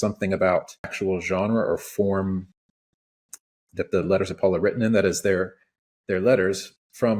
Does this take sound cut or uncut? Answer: cut